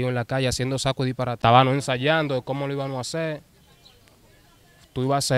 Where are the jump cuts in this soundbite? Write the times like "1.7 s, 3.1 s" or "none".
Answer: 1.4 s

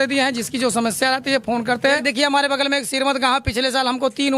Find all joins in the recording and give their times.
2.0 s

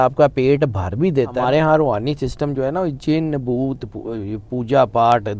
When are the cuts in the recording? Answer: 1.4 s

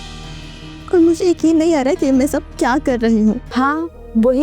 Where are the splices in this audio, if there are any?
3.4 s

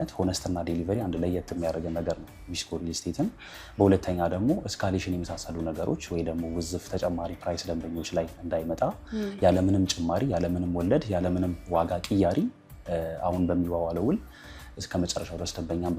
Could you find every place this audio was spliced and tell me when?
none

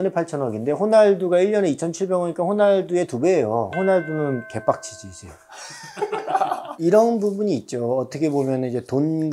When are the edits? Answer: 6.7 s

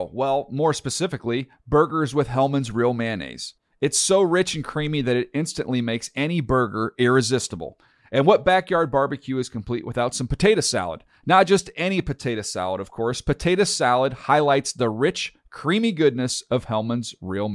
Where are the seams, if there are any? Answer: none

